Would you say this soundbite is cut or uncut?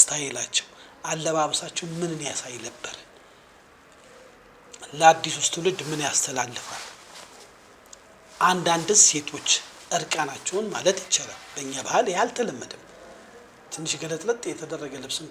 uncut